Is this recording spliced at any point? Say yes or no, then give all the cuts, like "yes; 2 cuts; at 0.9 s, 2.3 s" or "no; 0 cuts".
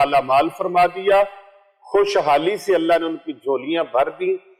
no; 0 cuts